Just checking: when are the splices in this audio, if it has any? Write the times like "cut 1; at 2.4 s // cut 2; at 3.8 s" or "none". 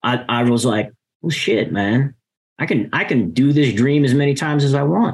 none